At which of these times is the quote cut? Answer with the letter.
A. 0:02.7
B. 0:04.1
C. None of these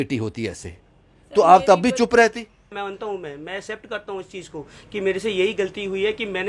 A